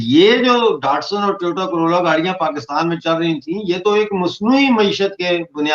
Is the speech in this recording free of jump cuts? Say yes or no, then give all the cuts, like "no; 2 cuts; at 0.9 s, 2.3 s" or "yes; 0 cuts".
yes; 0 cuts